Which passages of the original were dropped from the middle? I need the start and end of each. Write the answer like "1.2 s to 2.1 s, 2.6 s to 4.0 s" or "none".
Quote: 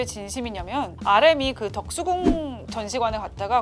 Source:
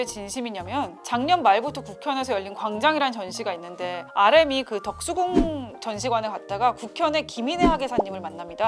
1.0 s to 4.1 s